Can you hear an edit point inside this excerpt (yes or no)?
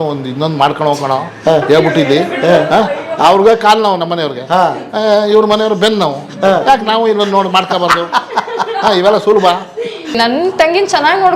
yes